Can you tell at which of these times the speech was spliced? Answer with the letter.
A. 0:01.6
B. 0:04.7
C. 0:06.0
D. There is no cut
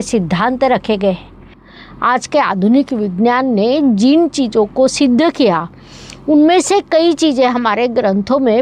A